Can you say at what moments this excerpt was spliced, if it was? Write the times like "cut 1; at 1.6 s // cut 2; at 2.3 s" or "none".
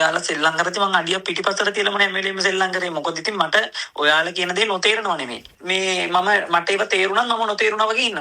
cut 1; at 5.4 s